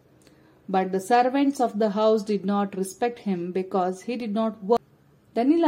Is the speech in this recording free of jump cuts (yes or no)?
no